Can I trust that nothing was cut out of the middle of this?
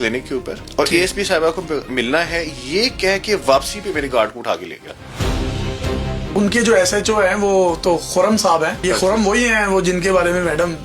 no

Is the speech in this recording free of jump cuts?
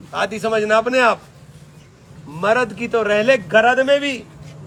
yes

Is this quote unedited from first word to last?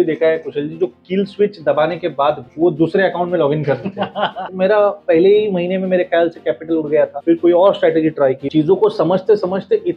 no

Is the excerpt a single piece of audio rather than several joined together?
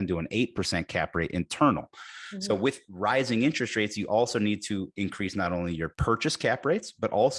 no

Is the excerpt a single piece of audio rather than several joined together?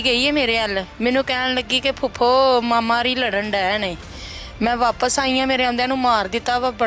no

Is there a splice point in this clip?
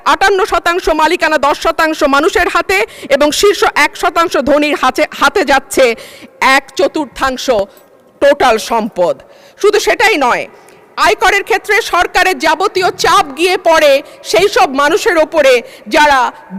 no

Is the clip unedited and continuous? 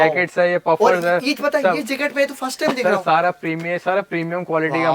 yes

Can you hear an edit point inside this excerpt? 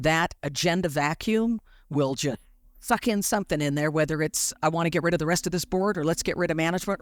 no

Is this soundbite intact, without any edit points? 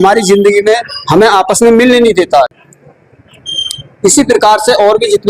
yes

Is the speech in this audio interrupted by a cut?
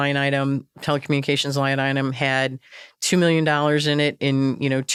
no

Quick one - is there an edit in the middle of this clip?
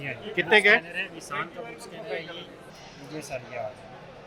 yes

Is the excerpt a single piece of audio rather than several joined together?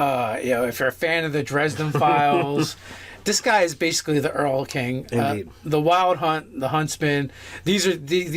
no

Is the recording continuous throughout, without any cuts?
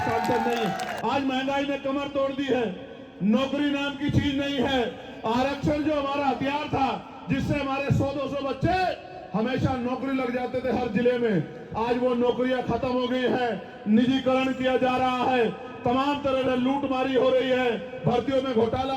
no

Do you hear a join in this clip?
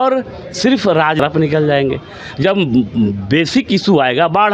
yes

